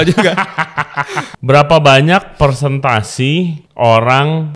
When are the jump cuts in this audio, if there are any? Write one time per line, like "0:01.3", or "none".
0:01.3
0:03.6